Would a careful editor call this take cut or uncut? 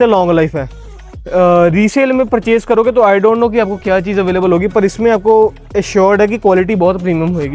uncut